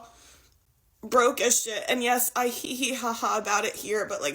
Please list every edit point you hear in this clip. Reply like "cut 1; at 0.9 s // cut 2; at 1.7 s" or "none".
cut 1; at 1.8 s